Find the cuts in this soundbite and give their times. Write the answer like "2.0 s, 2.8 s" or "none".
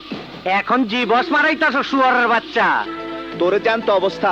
3.0 s